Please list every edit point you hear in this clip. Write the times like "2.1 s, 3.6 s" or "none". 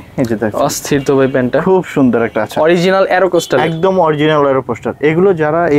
none